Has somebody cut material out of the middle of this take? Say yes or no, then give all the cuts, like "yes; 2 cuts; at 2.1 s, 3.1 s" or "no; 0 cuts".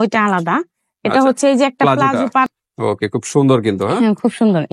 yes; 1 cut; at 2.5 s